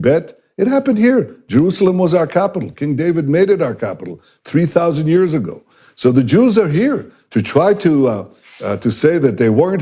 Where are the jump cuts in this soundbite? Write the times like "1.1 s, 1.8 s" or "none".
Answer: none